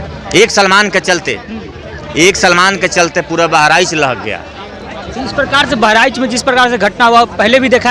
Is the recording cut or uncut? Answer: uncut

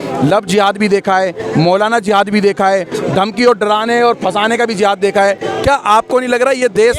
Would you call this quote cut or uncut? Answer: uncut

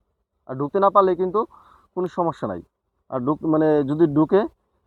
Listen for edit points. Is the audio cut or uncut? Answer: uncut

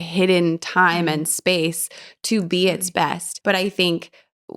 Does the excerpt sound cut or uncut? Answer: cut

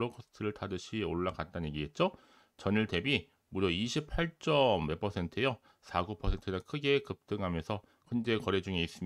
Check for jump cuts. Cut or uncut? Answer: cut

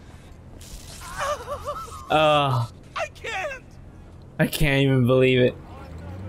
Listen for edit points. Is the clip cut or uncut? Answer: uncut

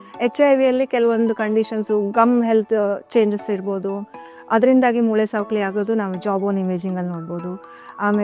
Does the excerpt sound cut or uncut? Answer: uncut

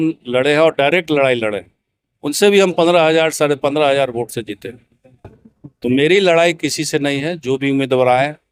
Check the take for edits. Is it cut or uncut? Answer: uncut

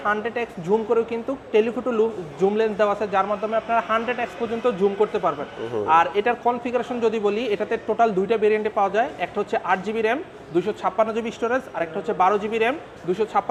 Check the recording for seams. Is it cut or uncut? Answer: uncut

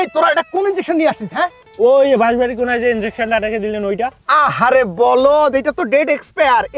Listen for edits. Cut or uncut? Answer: uncut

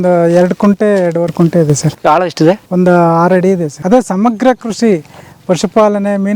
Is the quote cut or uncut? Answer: cut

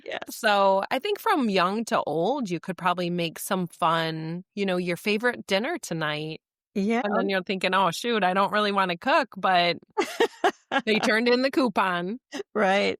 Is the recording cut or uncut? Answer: uncut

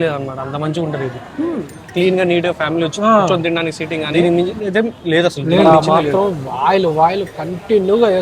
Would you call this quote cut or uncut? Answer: cut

